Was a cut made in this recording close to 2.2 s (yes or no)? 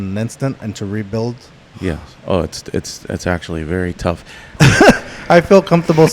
no